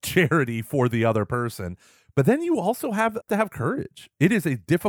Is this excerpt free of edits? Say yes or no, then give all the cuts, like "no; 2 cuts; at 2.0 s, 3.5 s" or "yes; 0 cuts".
no; 1 cut; at 3.3 s